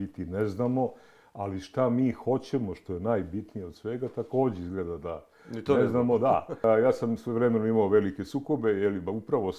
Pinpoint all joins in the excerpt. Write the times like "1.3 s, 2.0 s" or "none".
6.6 s